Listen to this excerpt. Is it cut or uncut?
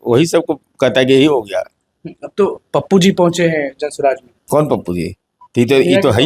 cut